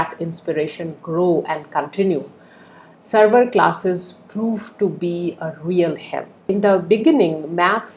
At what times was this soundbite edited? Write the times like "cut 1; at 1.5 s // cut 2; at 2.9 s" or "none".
cut 1; at 6.5 s